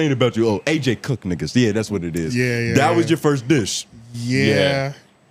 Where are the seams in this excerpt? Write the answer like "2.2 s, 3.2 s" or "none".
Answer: none